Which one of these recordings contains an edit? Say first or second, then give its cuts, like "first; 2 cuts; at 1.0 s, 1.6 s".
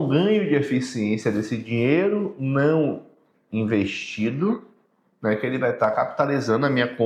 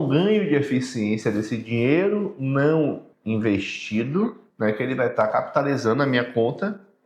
second; 2 cuts; at 3.1 s, 4.4 s